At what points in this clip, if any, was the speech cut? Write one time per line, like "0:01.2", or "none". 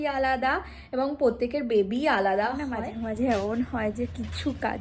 0:02.8